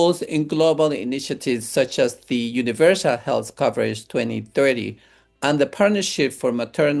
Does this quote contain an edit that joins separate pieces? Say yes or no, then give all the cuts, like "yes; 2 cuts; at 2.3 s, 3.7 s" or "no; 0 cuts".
no; 0 cuts